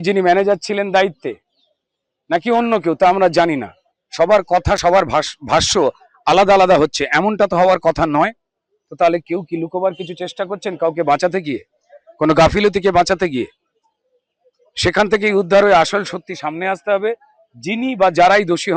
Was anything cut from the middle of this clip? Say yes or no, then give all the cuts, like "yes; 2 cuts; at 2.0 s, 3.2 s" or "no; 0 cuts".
no; 0 cuts